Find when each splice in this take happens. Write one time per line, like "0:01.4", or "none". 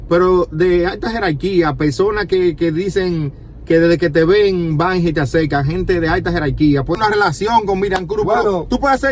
0:06.9

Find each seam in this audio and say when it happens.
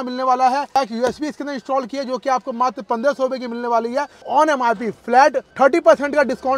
0:00.8
0:04.2
0:05.4

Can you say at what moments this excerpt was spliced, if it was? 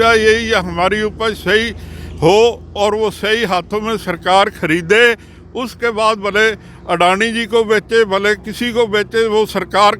none

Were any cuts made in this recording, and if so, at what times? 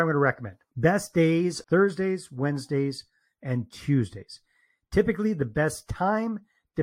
0:01.6

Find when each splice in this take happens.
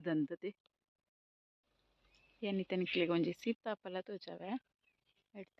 0:01.2

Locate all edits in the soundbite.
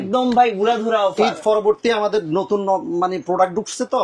none

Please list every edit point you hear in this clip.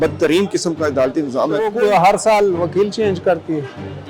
0:01.6

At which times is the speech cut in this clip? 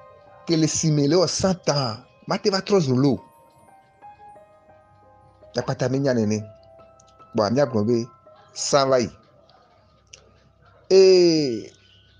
none

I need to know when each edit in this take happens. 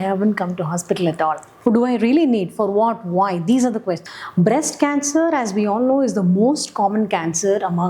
0:01.5
0:04.1

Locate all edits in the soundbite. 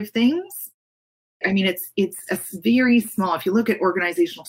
0:01.4

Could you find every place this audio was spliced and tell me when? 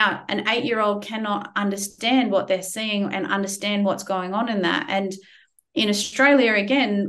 none

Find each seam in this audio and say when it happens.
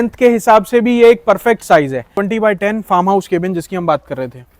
0:02.2

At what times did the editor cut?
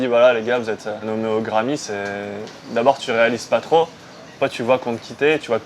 0:01.0

